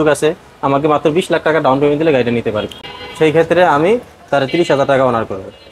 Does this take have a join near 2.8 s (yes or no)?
yes